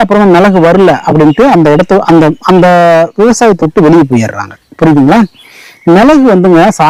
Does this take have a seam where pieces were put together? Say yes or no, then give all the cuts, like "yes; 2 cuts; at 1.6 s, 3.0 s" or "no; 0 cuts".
no; 0 cuts